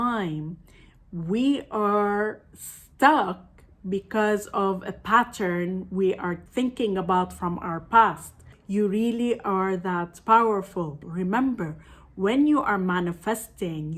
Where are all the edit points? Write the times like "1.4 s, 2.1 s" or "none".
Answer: 6.4 s, 8.5 s, 11.0 s